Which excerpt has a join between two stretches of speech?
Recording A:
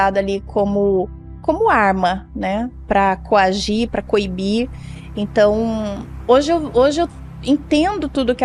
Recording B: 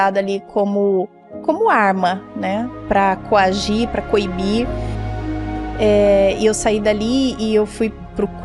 B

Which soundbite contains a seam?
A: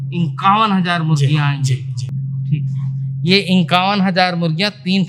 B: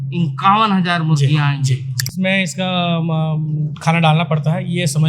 B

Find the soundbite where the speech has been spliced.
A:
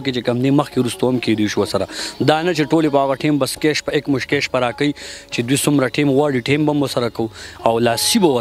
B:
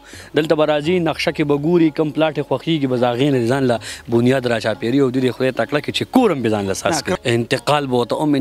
B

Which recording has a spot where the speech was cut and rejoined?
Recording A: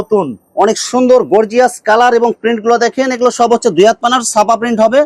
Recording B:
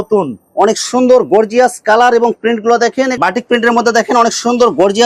B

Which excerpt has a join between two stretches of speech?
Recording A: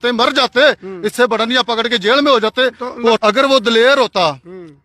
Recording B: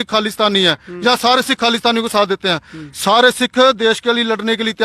A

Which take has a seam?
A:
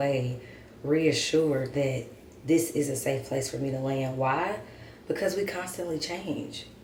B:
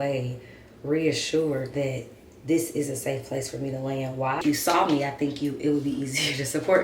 B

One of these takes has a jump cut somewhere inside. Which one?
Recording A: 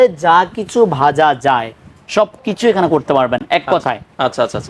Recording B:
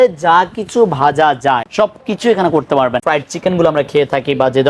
B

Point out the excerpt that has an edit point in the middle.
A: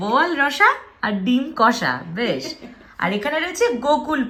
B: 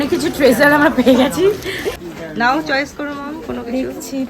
B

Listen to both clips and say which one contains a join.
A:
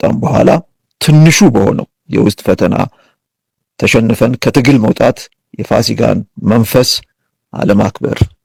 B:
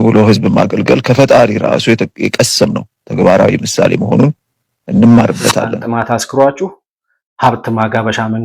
B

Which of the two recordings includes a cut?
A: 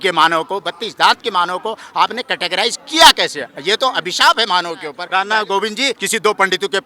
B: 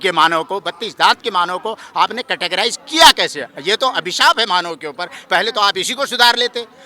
A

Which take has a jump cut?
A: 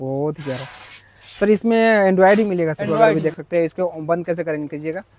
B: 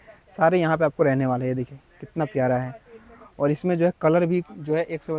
A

